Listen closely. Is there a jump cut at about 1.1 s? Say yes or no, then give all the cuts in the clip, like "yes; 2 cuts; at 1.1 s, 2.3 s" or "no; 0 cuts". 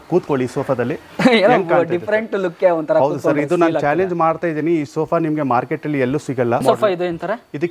no; 1 cut; at 6.6 s